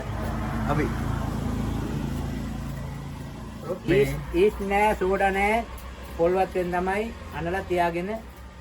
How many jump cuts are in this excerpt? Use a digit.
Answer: 1